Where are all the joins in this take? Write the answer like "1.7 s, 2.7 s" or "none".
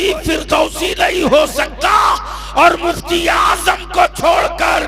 none